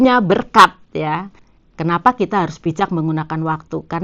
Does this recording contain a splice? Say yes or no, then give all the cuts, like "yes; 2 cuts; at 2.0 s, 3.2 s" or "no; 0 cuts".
yes; 1 cut; at 1.4 s